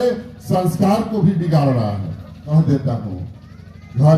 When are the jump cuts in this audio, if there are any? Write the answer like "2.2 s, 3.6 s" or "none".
2.5 s